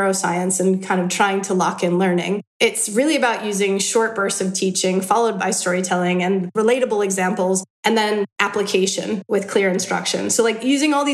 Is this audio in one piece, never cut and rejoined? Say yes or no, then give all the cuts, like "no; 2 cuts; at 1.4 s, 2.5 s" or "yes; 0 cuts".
yes; 0 cuts